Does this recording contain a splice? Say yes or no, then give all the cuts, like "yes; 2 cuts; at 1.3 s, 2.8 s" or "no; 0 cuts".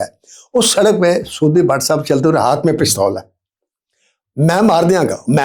no; 0 cuts